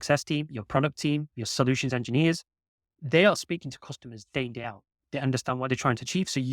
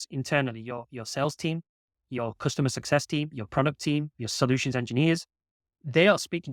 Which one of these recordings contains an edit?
first; 1 cut; at 5.0 s

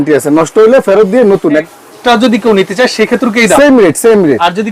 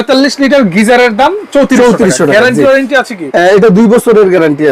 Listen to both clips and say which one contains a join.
first; 1 cut; at 1.7 s

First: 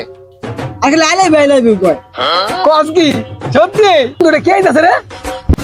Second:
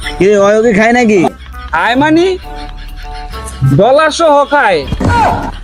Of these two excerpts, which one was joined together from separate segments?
first; 1 cut; at 4.2 s

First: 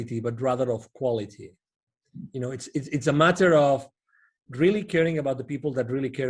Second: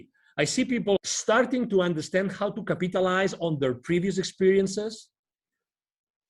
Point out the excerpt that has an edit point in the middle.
second; 1 cut; at 1.0 s

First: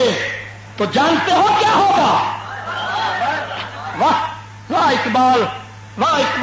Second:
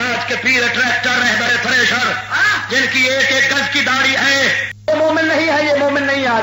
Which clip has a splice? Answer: second; 1 cut; at 4.7 s

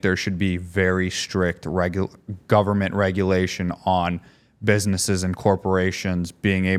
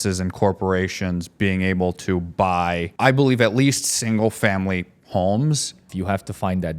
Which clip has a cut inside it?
second; 2 cuts; at 2.9 s, 5.8 s

